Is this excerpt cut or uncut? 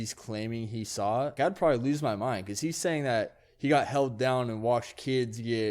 cut